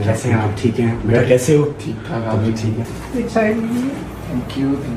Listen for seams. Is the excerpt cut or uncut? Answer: cut